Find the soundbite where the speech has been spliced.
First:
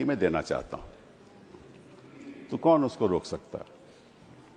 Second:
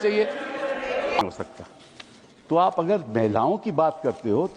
second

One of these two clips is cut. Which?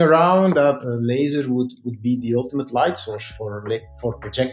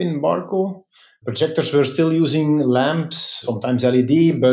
second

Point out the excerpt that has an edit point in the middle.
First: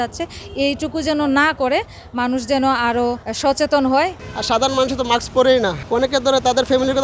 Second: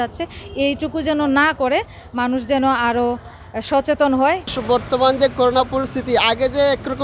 first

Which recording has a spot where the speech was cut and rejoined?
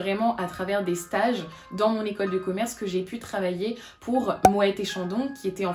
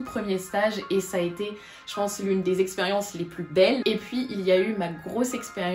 second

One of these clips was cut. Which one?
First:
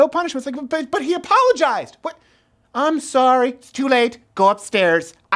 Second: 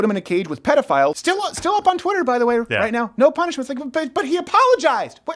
second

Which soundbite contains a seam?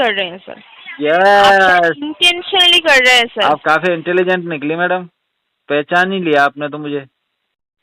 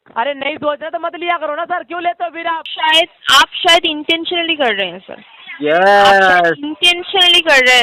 second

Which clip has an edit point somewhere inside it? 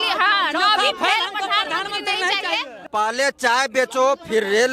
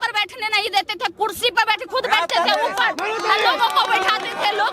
first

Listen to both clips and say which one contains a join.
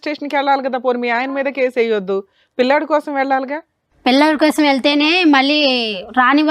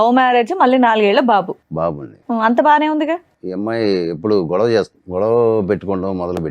second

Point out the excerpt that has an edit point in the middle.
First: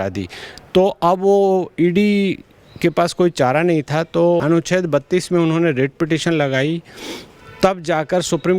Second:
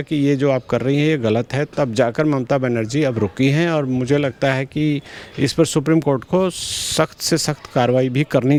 first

